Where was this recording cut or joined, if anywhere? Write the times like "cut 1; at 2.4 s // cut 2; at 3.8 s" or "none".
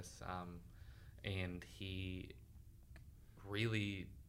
none